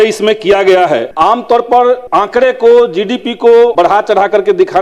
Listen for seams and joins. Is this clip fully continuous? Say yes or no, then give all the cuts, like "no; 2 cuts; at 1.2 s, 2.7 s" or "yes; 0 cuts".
no; 3 cuts; at 1.1 s, 2.0 s, 3.7 s